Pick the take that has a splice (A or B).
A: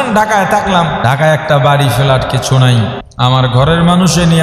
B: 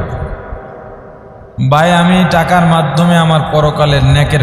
A